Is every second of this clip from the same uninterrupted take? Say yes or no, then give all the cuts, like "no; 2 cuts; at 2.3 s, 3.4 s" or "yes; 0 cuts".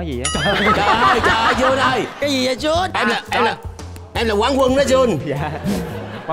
yes; 0 cuts